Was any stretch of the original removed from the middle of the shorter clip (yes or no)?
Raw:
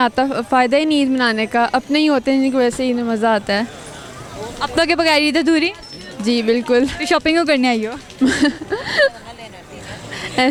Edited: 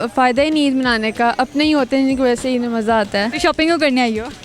yes